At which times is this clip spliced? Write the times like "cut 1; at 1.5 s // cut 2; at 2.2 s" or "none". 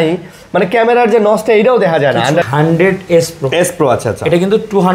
cut 1; at 2.5 s